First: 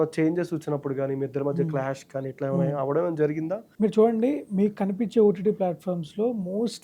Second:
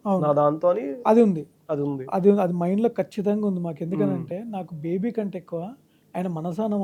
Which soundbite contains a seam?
first; 1 cut; at 3.6 s

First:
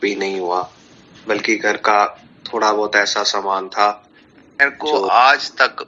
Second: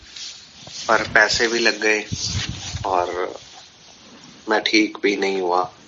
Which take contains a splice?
first; 1 cut; at 4.7 s

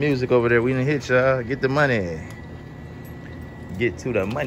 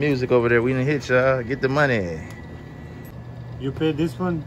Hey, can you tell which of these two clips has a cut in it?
second; 1 cut; at 3.1 s

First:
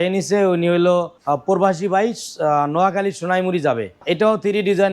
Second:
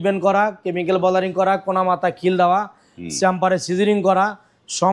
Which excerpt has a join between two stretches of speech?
first; 2 cuts; at 1.2 s, 4.0 s

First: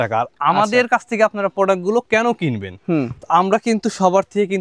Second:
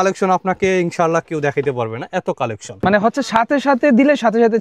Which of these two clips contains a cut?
second; 1 cut; at 2.7 s

